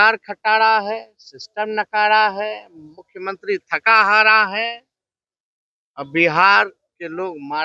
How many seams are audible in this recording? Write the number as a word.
zero